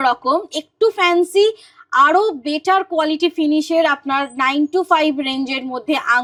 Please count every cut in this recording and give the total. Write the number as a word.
zero